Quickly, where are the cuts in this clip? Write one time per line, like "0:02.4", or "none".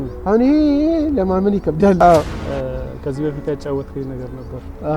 0:02.0